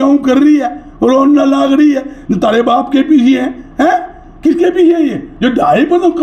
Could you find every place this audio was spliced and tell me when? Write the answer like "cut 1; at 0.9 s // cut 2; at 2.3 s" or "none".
cut 1; at 5.3 s